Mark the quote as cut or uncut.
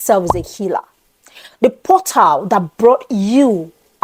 uncut